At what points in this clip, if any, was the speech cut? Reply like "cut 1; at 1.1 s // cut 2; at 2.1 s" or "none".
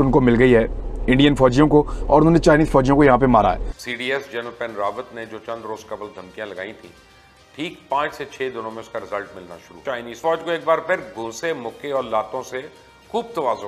cut 1; at 3.6 s // cut 2; at 9.8 s